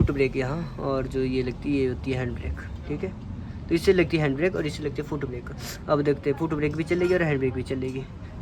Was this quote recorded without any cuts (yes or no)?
yes